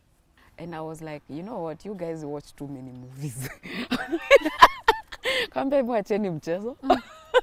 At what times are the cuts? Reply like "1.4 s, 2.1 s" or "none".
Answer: none